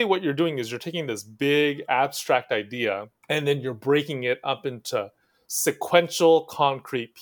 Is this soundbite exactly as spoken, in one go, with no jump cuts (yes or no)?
no